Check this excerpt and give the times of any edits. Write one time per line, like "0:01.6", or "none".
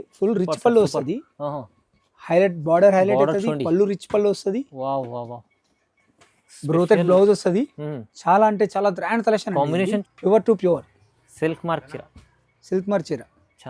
0:10.0